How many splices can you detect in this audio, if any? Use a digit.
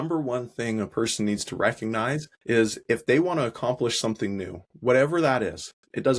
1